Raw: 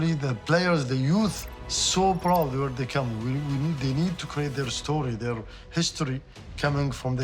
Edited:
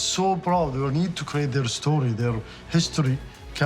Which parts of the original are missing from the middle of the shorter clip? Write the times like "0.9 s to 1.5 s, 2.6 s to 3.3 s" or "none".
2.7 s to 3.9 s